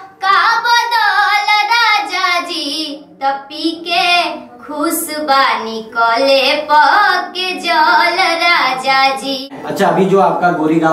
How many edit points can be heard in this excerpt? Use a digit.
1